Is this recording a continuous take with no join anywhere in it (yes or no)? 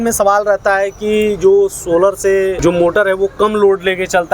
no